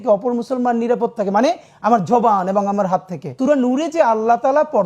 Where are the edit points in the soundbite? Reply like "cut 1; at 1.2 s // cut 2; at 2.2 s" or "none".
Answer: cut 1; at 3.3 s